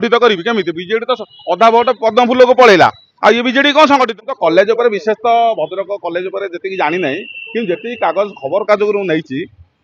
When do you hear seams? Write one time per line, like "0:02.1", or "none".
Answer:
0:04.1